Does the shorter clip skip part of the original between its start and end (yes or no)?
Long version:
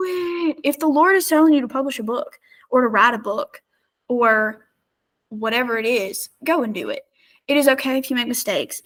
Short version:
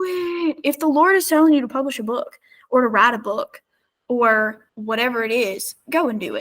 yes